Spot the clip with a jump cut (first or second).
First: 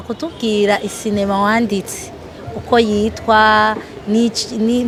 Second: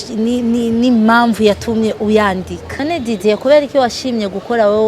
second